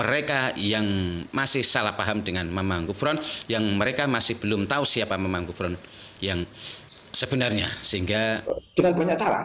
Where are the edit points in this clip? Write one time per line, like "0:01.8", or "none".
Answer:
0:08.5